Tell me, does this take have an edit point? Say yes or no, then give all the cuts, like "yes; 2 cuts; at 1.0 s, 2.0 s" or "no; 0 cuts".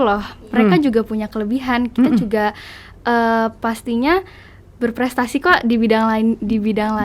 no; 0 cuts